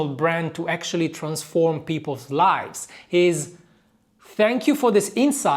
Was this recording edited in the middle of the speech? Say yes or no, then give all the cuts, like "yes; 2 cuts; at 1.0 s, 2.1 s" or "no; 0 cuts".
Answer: no; 0 cuts